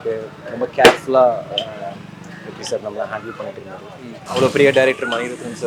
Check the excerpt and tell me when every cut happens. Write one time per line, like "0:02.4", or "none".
0:04.2